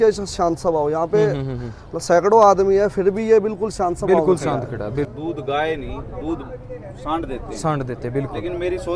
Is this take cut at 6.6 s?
no; 1 cut; at 5.1 s

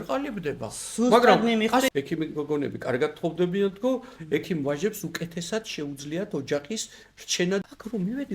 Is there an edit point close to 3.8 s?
no; 2 cuts; at 1.9 s, 7.6 s

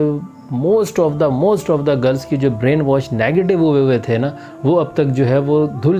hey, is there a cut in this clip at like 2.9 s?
no; 0 cuts

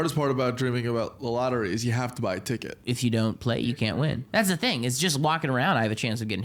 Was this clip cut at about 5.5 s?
no; 2 cuts; at 2.8 s, 4.2 s

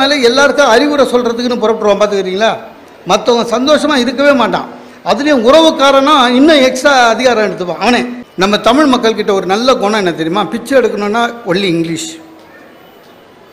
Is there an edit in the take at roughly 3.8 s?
no; 1 cut; at 8.2 s

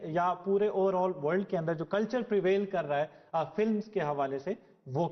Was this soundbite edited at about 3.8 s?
no; 0 cuts

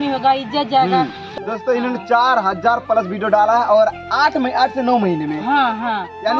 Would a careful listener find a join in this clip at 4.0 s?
no; 1 cut; at 1.2 s

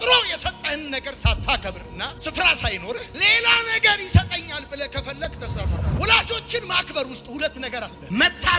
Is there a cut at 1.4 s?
no; 1 cut; at 5.9 s

